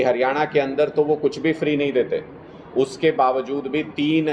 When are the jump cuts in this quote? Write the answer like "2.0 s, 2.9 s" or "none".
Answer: none